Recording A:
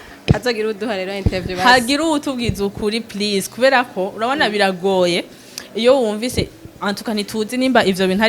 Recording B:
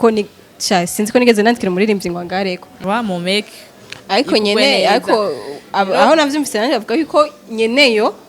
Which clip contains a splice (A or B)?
B